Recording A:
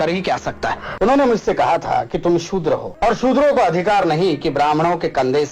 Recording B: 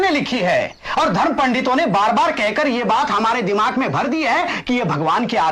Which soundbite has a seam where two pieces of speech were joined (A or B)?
A